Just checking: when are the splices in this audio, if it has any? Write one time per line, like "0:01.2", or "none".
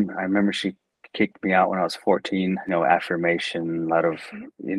0:02.7